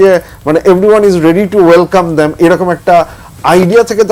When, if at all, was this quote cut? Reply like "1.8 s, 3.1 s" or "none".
none